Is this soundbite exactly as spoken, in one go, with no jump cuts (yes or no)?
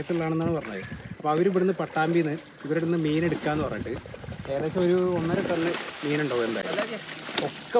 yes